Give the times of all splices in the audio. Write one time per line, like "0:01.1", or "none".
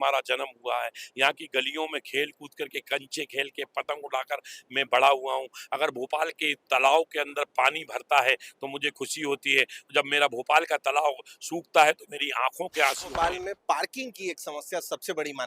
0:13.2